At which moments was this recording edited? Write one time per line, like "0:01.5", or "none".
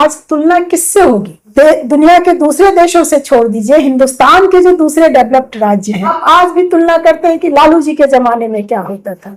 0:01.4
0:06.2